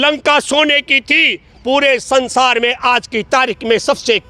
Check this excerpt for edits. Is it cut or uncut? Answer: uncut